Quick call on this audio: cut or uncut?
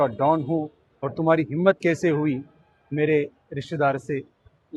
uncut